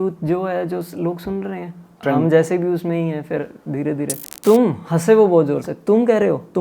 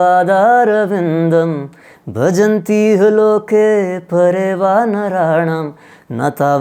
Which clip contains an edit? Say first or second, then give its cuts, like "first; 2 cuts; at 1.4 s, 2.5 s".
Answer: first; 1 cut; at 4.3 s